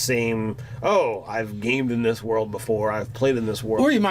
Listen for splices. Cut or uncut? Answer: cut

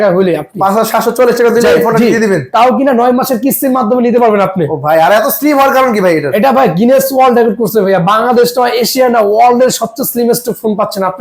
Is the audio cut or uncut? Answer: uncut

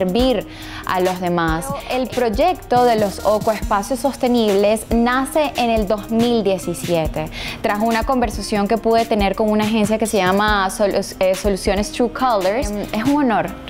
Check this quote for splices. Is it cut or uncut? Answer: cut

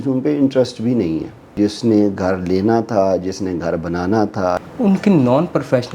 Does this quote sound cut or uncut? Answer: cut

